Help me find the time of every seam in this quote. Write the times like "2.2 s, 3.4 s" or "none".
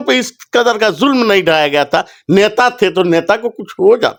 none